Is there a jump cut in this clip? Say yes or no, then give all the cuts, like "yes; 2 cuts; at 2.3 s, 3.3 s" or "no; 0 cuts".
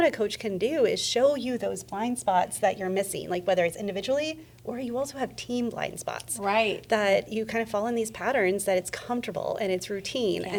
no; 0 cuts